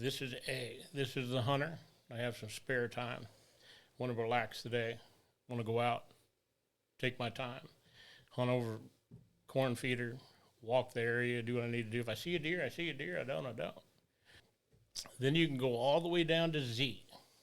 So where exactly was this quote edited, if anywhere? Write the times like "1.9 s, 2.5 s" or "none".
14.4 s